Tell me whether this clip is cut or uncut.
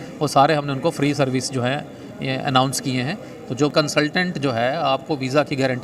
cut